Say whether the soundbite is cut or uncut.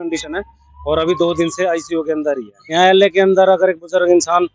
cut